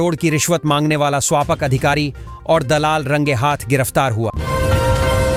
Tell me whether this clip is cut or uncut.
uncut